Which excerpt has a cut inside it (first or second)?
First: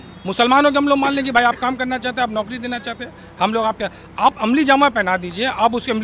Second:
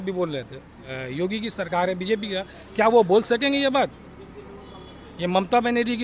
second